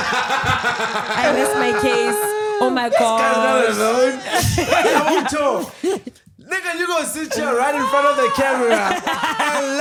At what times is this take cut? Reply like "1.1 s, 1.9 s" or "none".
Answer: none